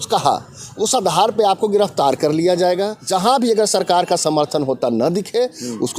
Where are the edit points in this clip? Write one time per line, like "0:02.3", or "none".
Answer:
0:03.0